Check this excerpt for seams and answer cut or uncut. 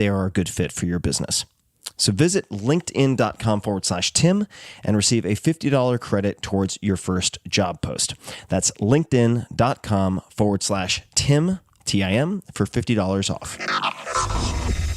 cut